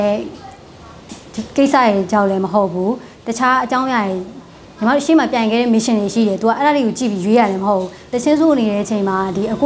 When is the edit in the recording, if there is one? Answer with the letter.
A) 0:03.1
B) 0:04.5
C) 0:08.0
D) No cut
C